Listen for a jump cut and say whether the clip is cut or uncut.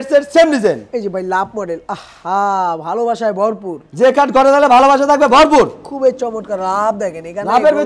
uncut